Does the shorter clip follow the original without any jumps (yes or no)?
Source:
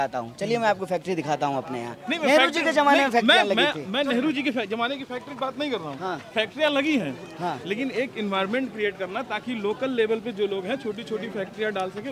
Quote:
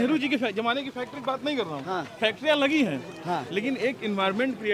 yes